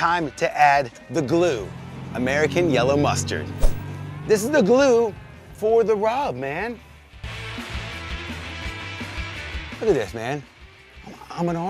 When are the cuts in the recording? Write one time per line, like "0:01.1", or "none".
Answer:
none